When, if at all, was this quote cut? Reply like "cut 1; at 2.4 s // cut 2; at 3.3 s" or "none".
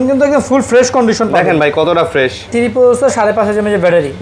cut 1; at 2.5 s